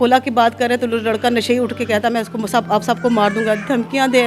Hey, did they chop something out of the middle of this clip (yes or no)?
no